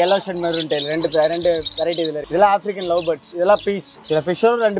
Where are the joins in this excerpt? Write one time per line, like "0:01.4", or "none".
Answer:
0:02.0
0:03.9